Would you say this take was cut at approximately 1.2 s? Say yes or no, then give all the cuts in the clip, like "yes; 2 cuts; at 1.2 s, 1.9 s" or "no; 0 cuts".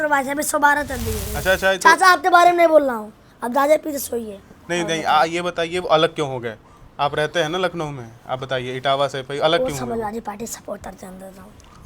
yes; 1 cut; at 1.2 s